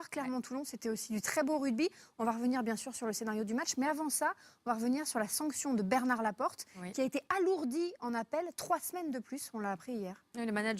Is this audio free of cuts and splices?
yes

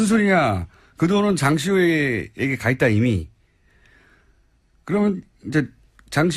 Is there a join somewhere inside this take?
no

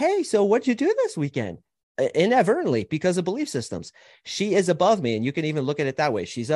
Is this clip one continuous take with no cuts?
yes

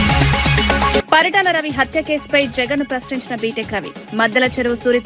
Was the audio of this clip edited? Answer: yes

